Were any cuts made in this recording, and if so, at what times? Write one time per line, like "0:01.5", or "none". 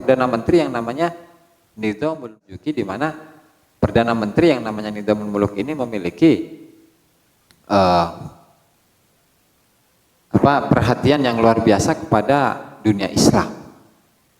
0:02.3